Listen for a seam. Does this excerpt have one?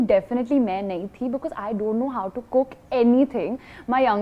no; 0 cuts

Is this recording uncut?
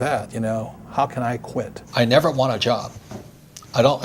no; 1 cut; at 1.8 s

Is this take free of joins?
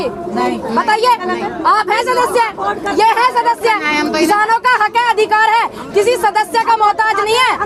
yes; 0 cuts

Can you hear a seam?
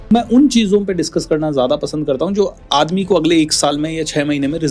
no; 0 cuts

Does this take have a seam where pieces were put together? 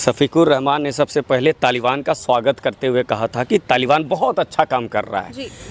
no; 0 cuts

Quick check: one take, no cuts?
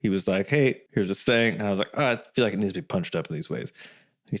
yes; 0 cuts

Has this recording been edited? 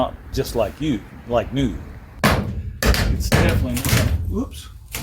yes; 1 cut; at 2.1 s

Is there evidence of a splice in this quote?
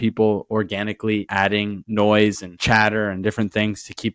yes; 1 cut; at 1.3 s

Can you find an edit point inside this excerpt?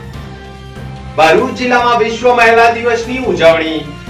yes; 1 cut; at 1.1 s

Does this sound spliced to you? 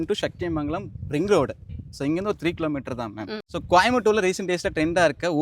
yes; 1 cut; at 3.4 s

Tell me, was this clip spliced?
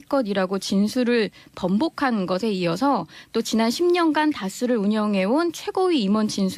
yes; 1 cut; at 3.9 s

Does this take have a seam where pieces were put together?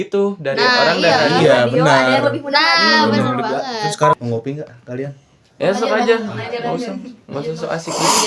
yes; 1 cut; at 4.1 s

